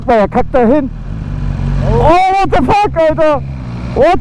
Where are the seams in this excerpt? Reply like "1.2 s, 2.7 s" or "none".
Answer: none